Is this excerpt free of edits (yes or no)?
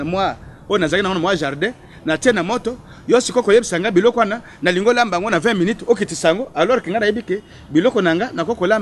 yes